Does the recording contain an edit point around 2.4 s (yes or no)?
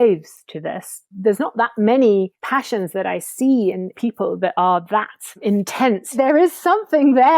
yes